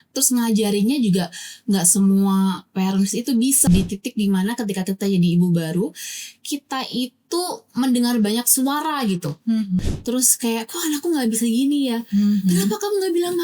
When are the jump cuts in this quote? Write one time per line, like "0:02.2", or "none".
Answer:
0:03.7
0:09.8